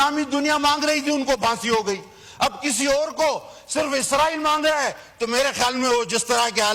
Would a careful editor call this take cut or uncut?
uncut